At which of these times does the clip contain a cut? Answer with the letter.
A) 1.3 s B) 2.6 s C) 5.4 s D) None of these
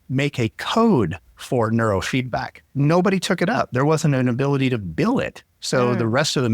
B